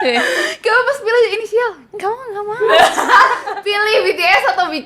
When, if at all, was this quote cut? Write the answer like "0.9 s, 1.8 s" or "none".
3.5 s